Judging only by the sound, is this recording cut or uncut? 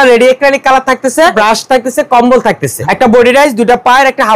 cut